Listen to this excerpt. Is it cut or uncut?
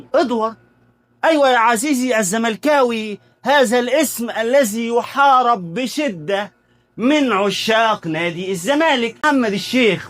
cut